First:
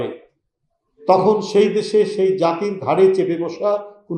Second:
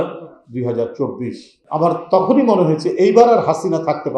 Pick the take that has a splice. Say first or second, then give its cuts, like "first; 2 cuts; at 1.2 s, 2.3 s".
second; 1 cut; at 1.6 s